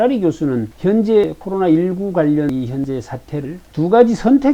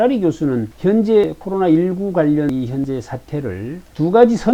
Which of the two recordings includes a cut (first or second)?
first